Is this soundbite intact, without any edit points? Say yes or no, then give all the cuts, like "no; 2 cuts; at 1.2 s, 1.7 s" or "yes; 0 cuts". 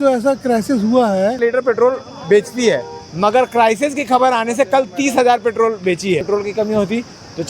no; 2 cuts; at 1.4 s, 6.2 s